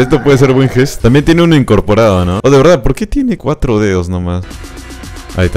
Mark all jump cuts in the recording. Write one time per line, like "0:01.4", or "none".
0:00.9
0:02.4
0:04.4